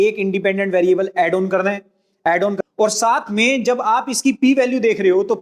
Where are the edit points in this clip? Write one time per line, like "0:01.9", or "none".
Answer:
0:02.5